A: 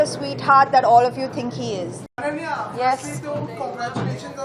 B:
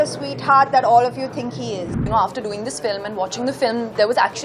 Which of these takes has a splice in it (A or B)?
B